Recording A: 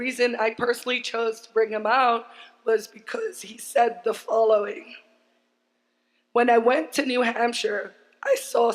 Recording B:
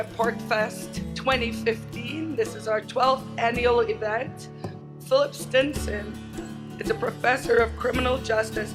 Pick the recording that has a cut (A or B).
A